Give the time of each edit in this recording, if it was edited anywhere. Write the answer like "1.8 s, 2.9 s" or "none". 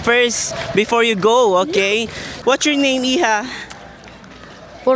2.2 s

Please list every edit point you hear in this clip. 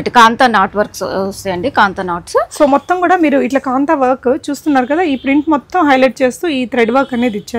none

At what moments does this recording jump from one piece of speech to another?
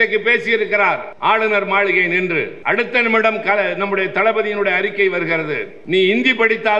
1.1 s, 2.5 s, 5.7 s

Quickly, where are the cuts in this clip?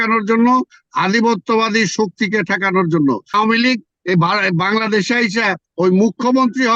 3.3 s

